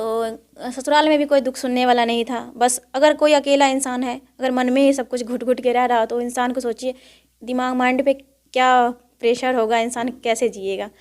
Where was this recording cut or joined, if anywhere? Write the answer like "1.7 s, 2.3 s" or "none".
none